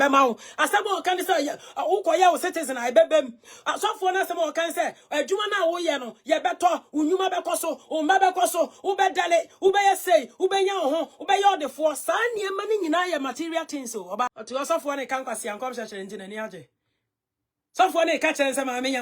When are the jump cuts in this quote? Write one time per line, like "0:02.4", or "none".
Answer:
0:14.3